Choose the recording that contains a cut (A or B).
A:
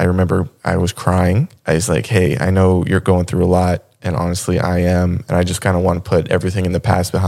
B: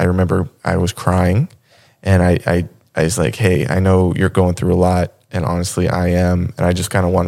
A